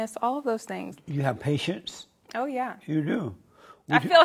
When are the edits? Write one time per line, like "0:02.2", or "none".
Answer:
0:00.9